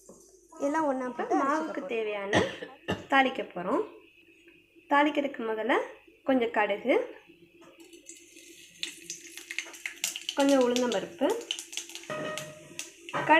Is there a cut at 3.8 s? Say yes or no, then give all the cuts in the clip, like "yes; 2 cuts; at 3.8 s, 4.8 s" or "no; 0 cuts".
no; 1 cut; at 1.1 s